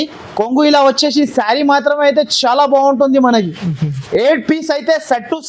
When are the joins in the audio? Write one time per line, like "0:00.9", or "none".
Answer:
none